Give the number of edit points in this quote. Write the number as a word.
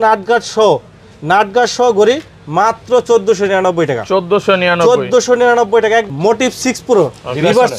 one